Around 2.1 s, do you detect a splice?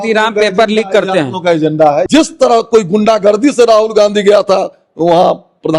yes; 1 cut; at 2.1 s

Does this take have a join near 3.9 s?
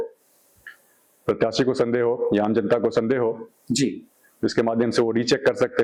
no; 0 cuts

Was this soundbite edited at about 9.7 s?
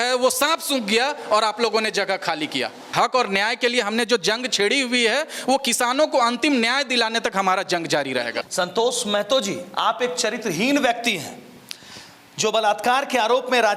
no; 2 cuts; at 2.9 s, 8.4 s

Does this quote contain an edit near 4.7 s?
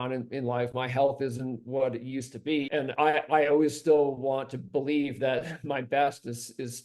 no; 1 cut; at 2.9 s

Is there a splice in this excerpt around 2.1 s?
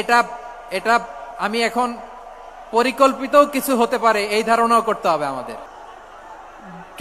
no; 1 cut; at 5.7 s

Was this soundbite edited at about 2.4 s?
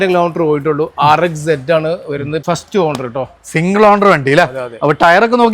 yes; 1 cut; at 2.4 s

